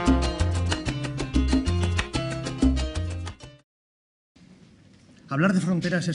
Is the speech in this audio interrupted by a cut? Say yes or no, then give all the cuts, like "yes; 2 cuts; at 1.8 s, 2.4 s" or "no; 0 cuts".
no; 0 cuts